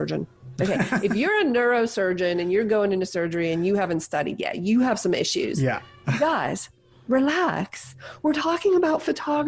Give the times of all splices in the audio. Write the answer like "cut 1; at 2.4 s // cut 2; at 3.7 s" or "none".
none